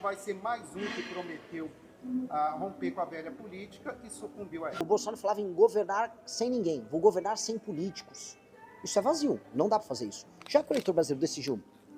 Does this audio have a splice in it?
yes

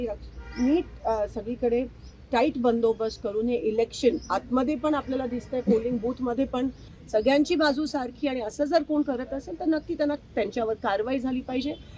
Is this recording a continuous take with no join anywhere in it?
no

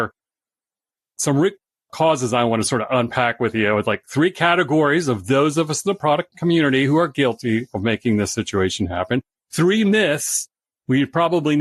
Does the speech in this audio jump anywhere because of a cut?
no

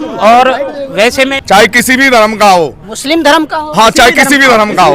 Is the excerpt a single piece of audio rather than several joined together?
no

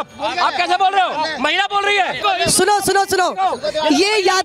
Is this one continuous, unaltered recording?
no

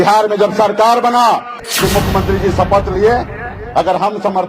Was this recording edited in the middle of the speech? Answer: yes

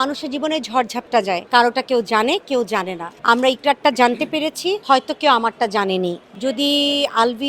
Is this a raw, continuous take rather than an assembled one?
no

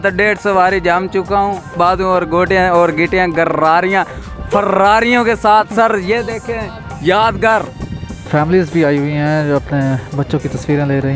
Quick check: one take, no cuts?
no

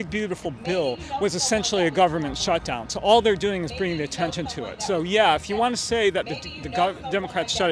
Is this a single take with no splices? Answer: yes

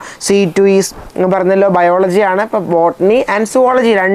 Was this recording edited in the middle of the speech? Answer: yes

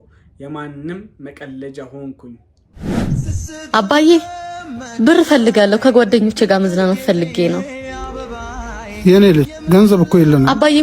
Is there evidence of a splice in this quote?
yes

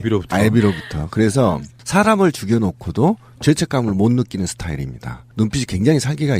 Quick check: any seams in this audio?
yes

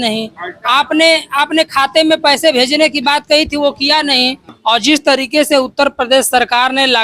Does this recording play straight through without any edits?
no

